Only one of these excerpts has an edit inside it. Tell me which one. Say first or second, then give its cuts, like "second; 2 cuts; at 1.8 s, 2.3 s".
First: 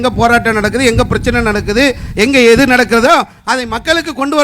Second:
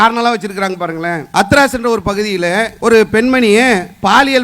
second; 2 cuts; at 1.2 s, 2.7 s